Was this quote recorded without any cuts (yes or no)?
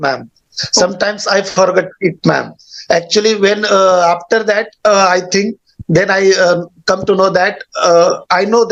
yes